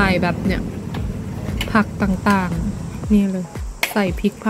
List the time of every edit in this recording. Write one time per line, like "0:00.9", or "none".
0:02.9